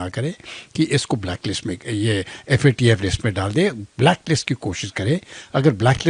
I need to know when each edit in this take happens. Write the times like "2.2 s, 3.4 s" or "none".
none